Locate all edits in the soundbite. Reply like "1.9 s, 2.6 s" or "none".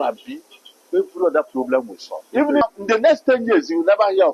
2.6 s